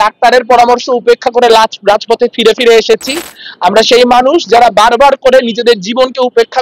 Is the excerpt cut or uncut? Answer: uncut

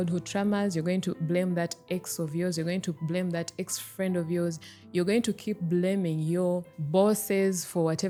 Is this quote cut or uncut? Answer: uncut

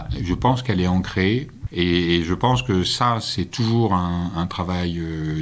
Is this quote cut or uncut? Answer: cut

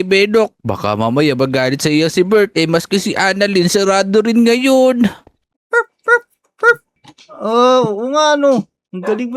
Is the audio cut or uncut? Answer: cut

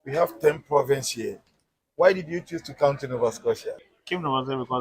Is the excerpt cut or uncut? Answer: cut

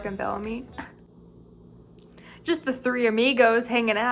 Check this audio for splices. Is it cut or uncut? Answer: uncut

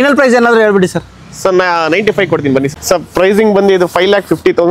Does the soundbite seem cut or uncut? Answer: cut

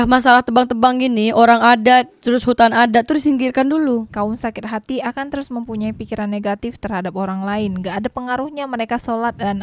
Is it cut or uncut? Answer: cut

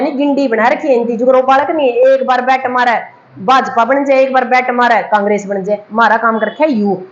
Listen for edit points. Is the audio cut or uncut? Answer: uncut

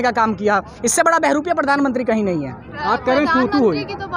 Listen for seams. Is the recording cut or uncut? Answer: uncut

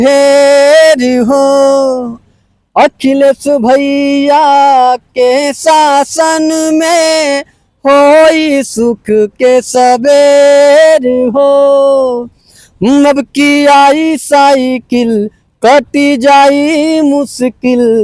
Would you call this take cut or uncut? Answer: uncut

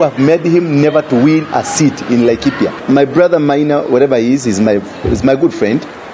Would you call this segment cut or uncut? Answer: cut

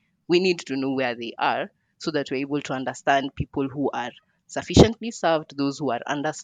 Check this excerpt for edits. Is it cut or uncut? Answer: uncut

